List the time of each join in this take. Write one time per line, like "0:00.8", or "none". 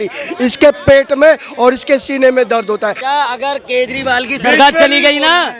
0:03.0